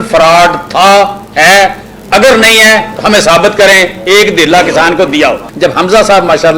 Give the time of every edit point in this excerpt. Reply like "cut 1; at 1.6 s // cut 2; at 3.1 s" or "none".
cut 1; at 5.5 s